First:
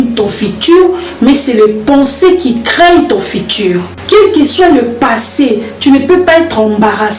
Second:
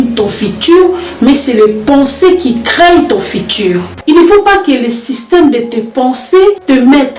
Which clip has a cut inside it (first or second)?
second